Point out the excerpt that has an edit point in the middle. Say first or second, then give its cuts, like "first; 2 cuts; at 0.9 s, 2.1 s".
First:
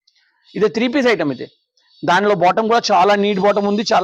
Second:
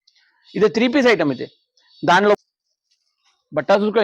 second; 1 cut; at 2.4 s